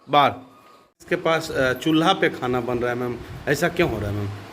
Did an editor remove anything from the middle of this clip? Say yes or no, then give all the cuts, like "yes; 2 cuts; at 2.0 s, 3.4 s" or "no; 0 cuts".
yes; 1 cut; at 1.0 s